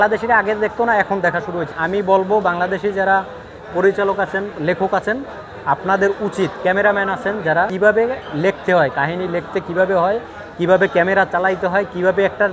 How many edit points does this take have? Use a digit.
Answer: 2